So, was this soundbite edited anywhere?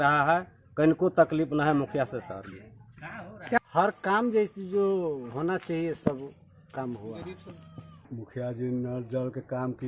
yes; 2 cuts; at 3.6 s, 8.1 s

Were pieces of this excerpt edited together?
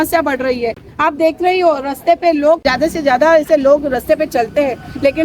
yes; 1 cut; at 2.6 s

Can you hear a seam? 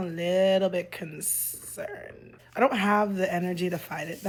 no; 0 cuts

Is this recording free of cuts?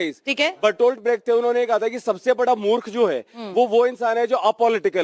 yes; 0 cuts

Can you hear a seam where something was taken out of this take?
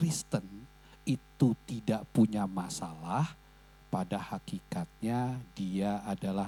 no; 0 cuts

